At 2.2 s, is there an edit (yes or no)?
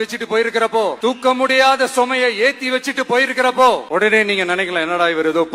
no